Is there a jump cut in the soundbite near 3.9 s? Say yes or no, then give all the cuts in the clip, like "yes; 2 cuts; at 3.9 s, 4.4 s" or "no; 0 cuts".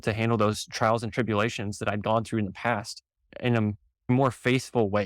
yes; 1 cut; at 3.9 s